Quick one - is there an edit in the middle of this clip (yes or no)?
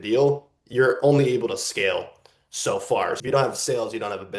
yes